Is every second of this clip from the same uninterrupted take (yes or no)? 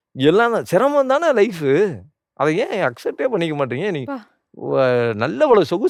yes